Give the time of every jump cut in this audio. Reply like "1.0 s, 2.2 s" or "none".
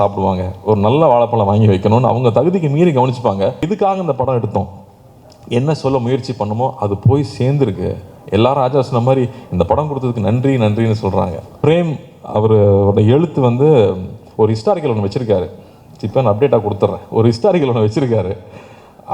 3.7 s, 11.5 s